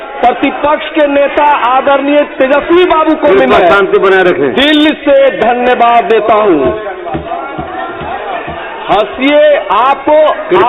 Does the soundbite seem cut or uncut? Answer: uncut